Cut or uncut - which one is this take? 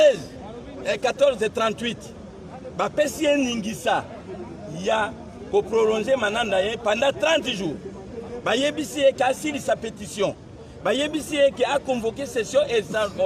uncut